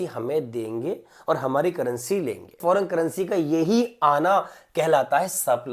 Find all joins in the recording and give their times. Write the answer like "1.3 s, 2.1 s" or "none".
2.5 s